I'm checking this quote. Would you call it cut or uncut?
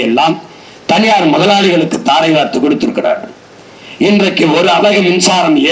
uncut